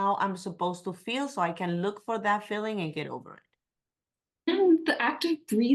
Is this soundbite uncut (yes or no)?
no